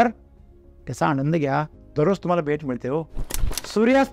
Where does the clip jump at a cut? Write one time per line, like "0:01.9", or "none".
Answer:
0:01.8